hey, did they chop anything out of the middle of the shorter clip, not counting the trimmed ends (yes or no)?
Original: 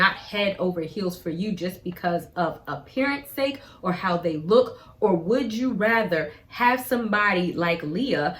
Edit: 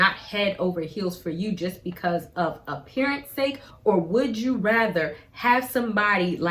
yes